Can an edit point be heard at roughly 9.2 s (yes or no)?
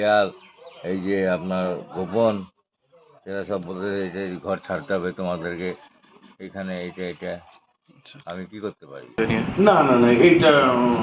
yes